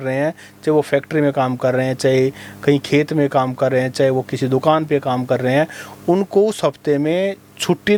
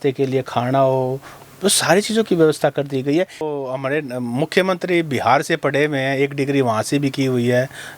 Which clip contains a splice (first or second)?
second